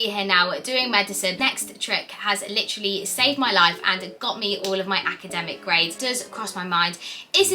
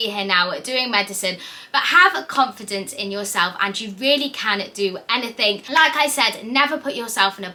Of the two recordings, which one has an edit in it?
first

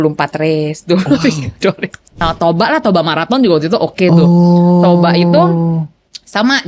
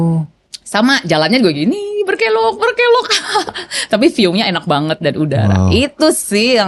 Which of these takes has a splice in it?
first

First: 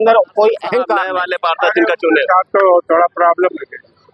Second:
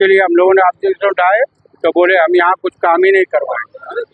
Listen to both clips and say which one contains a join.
first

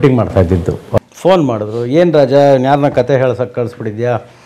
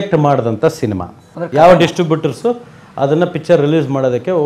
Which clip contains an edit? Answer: first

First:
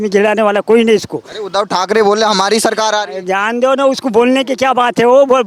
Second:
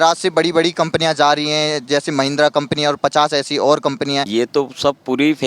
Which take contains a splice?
second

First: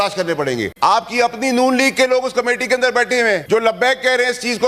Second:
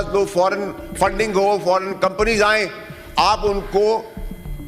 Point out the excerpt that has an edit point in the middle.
first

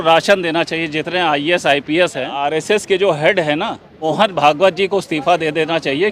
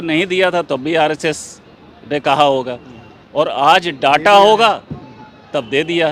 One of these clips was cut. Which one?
first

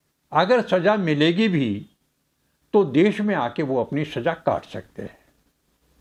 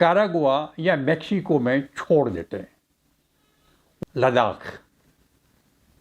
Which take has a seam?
second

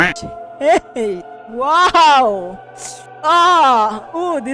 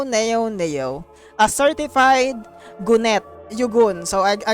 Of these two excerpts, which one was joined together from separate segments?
second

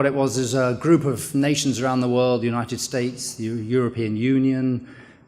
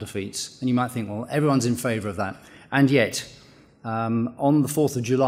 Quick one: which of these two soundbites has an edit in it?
first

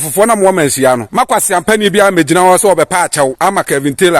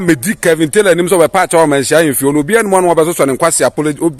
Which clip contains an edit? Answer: first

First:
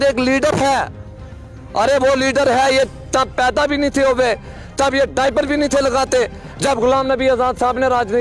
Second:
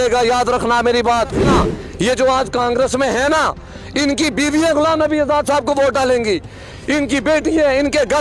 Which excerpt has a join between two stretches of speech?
second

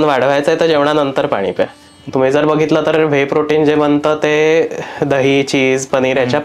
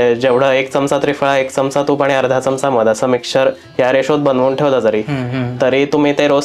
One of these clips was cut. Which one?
first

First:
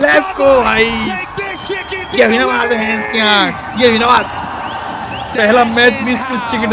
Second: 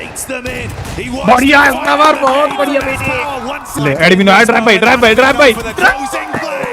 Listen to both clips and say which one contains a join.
second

